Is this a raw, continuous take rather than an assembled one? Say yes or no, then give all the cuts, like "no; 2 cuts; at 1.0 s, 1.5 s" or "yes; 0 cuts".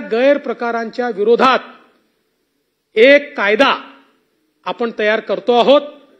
yes; 0 cuts